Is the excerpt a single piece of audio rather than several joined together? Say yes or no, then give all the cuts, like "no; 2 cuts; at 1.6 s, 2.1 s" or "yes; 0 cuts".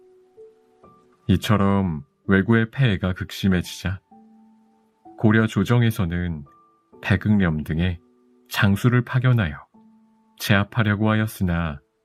yes; 0 cuts